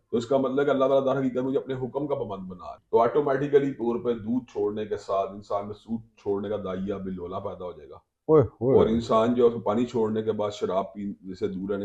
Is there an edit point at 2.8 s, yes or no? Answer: yes